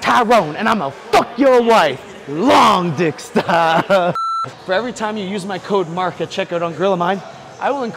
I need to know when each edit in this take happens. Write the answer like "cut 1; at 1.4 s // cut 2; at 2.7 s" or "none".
cut 1; at 4.5 s